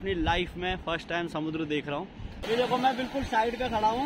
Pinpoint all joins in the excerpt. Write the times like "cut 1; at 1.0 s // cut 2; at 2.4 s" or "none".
cut 1; at 2.4 s